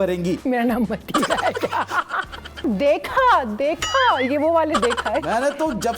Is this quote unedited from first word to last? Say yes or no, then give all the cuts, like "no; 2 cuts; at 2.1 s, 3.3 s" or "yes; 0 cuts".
no; 1 cut; at 2.6 s